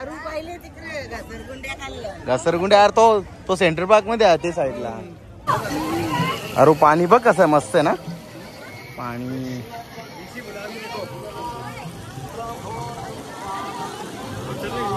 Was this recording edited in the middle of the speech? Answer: yes; 1 cut; at 5.4 s

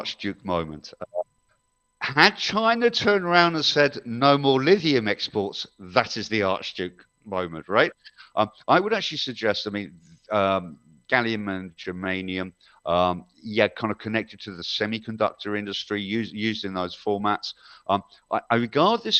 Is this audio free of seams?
yes; 0 cuts

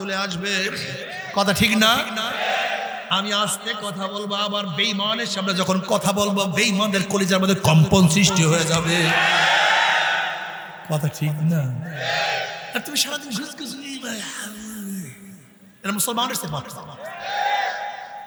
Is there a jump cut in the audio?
no; 0 cuts

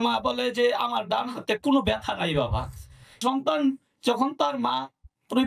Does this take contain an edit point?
yes; 1 cut; at 3.2 s

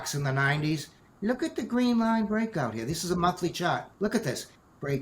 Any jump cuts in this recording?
yes; 1 cut; at 3.9 s

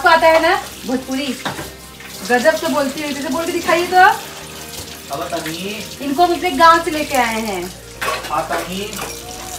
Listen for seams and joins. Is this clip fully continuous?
yes; 0 cuts

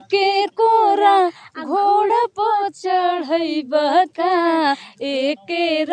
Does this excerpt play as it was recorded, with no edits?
yes; 0 cuts

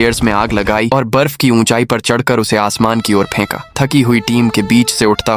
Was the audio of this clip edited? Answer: no; 0 cuts

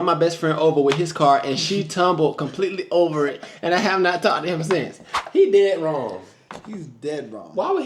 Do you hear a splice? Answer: no; 0 cuts

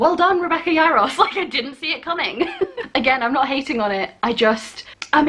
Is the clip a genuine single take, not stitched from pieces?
yes; 0 cuts

